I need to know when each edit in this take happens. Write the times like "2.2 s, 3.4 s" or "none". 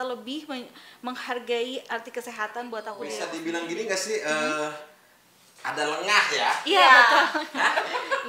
3.2 s